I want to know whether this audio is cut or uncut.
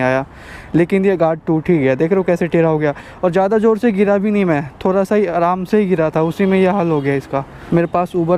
uncut